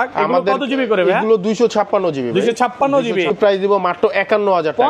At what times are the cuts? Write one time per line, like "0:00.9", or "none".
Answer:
0:03.3